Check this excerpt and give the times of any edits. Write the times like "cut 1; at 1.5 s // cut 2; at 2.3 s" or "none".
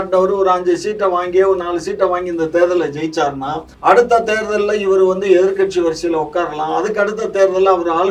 cut 1; at 3.7 s